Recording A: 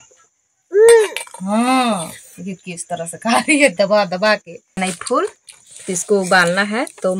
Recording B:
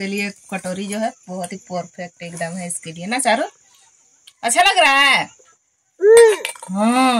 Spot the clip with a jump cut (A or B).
A